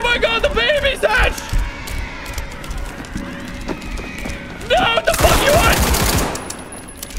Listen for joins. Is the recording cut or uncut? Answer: uncut